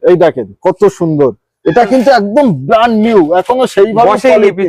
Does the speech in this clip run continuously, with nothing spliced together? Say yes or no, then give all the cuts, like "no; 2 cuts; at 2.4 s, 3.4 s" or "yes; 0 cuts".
yes; 0 cuts